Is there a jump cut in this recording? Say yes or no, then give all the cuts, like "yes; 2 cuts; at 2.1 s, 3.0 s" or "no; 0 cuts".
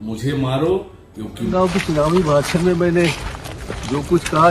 yes; 1 cut; at 1.4 s